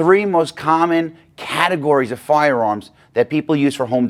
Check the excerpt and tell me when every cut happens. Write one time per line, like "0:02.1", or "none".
none